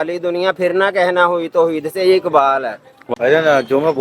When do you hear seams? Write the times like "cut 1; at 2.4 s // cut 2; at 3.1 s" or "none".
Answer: cut 1; at 2.9 s